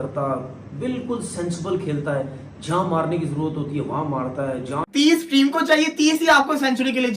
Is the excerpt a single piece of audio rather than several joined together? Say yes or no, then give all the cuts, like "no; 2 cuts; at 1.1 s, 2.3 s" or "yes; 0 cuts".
no; 1 cut; at 4.8 s